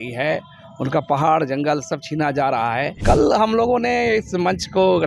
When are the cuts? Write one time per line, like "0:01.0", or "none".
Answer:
0:03.0